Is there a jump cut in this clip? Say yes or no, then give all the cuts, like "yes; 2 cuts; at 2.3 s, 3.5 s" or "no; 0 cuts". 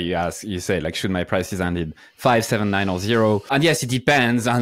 yes; 1 cut; at 3.4 s